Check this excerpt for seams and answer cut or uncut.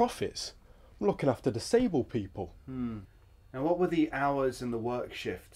uncut